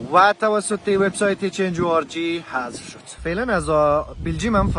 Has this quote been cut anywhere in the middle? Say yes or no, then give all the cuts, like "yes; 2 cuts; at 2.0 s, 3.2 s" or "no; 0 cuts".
yes; 1 cut; at 3.2 s